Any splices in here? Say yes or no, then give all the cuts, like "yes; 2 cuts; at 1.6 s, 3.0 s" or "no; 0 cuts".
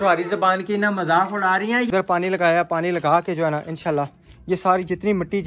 yes; 1 cut; at 1.9 s